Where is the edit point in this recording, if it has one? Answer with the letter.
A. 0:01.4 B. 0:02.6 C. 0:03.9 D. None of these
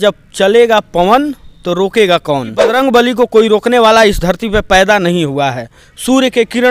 B